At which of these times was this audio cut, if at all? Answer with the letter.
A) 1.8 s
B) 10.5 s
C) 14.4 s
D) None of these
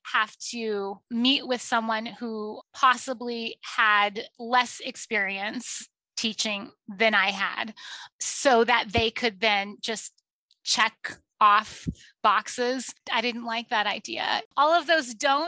C